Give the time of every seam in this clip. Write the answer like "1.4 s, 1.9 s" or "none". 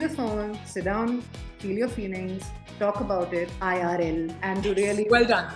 3.5 s, 4.4 s